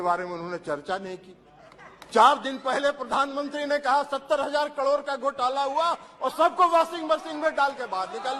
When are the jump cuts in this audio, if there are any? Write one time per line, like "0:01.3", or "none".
none